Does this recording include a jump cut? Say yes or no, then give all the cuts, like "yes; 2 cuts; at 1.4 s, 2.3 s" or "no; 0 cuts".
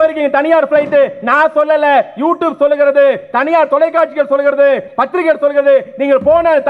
no; 0 cuts